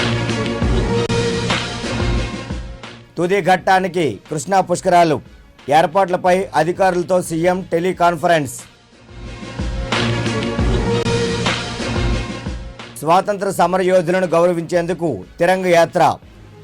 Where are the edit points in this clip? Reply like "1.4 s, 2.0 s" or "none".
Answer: 1.0 s